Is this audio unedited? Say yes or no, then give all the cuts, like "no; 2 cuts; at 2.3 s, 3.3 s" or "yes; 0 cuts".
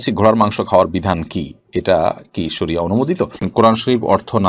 no; 1 cut; at 3.5 s